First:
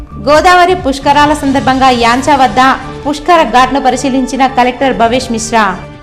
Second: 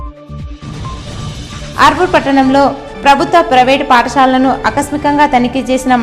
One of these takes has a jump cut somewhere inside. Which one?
second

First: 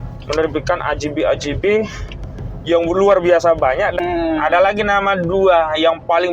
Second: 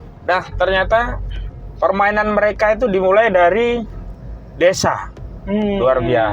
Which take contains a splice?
first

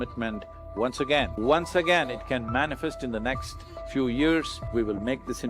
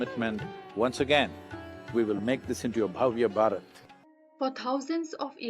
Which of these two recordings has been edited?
first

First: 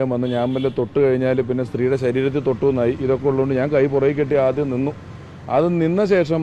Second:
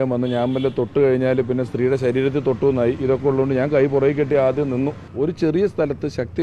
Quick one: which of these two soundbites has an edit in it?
second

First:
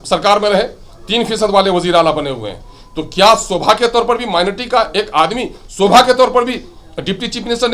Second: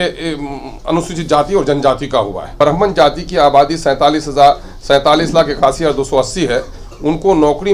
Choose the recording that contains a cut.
second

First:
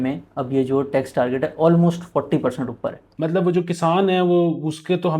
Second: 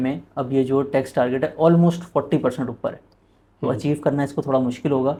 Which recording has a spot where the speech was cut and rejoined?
first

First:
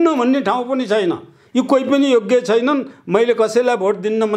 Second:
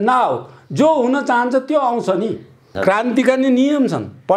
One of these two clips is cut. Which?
second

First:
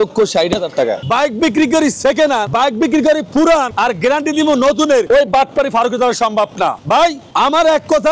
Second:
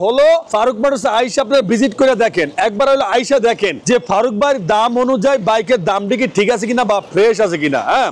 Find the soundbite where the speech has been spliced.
first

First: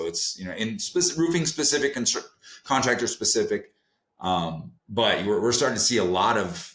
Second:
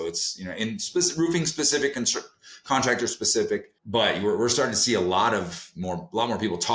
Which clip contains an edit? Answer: second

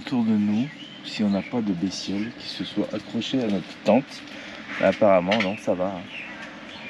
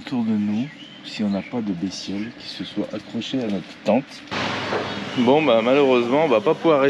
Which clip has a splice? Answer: second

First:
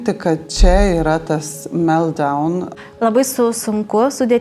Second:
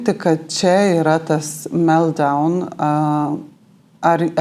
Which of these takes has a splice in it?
first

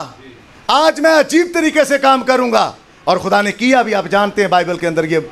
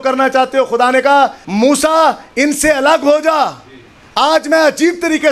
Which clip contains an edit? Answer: second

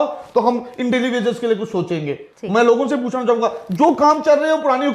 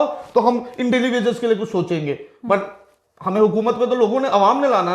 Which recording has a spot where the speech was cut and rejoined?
first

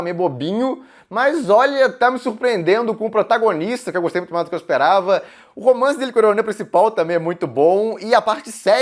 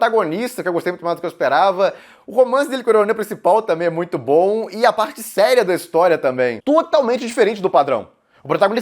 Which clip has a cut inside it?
second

